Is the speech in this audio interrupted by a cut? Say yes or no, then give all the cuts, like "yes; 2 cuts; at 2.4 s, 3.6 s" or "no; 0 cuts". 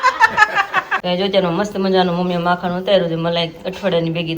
yes; 1 cut; at 0.9 s